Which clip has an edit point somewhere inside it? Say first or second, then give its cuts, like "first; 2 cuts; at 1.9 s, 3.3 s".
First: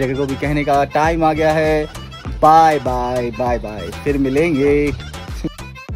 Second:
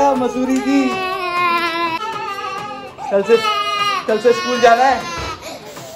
second; 1 cut; at 2.0 s